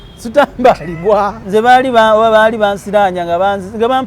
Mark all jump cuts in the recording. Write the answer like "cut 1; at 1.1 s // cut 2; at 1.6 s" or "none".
cut 1; at 1.4 s